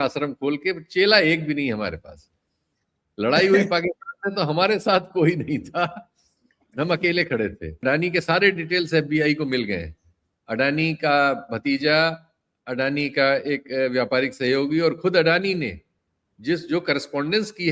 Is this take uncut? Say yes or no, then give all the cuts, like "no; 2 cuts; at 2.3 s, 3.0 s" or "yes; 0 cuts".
no; 1 cut; at 7.7 s